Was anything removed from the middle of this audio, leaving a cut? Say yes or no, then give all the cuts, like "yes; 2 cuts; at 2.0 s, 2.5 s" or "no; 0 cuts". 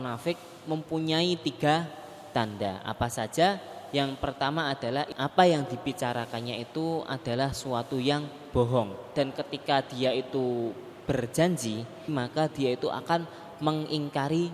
yes; 3 cuts; at 5.1 s, 9.1 s, 12.1 s